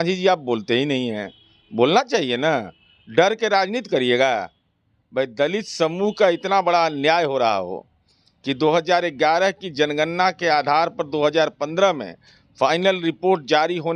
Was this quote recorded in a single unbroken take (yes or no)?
yes